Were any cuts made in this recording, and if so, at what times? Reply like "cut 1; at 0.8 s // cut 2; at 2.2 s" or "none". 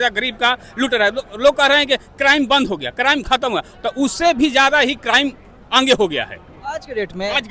none